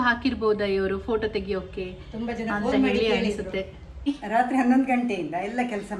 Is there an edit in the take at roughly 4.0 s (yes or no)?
yes